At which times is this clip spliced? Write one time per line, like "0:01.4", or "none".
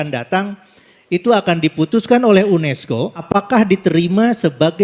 0:03.2